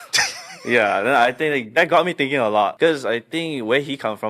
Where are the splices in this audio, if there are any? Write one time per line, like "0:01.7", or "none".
0:02.7